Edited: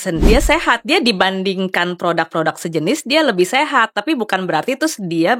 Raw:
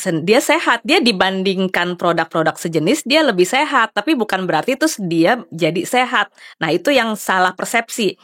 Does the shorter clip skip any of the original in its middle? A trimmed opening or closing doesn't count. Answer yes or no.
no